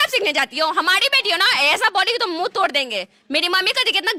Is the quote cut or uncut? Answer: uncut